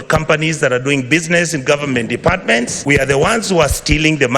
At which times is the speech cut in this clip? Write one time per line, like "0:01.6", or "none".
0:02.8